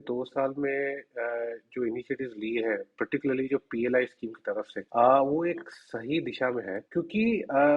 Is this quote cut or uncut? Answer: cut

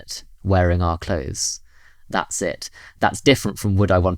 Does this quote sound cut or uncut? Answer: cut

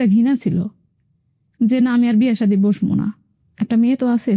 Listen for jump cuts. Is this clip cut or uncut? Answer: uncut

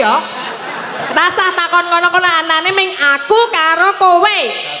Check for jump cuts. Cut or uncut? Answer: cut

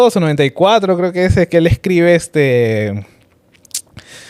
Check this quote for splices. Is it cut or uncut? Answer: uncut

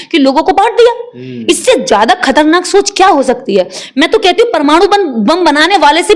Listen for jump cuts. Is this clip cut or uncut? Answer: uncut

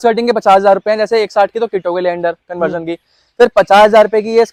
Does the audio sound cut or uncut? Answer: uncut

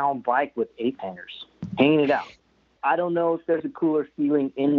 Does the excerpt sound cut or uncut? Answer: cut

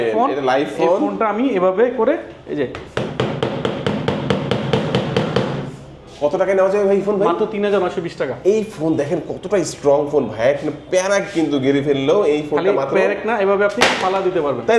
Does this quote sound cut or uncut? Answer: uncut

